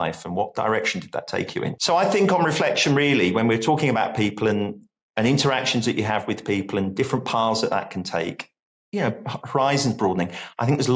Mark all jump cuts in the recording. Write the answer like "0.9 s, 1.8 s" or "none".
1.8 s